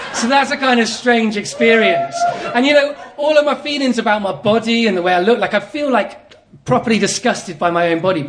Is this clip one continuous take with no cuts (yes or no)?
yes